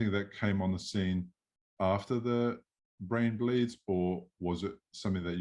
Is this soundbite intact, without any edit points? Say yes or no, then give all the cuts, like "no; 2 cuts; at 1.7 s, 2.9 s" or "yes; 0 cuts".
yes; 0 cuts